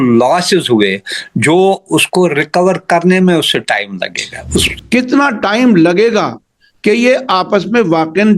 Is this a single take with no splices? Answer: no; 1 cut; at 4.7 s

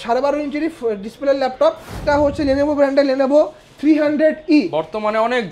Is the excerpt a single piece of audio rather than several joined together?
no; 1 cut; at 2.0 s

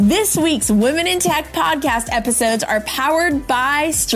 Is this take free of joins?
yes; 0 cuts

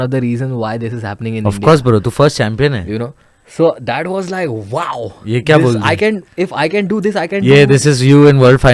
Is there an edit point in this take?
no; 0 cuts

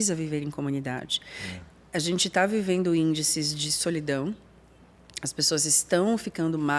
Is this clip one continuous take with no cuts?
yes; 0 cuts

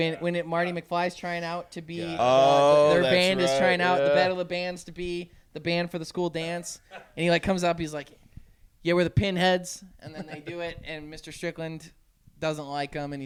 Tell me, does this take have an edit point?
no; 0 cuts

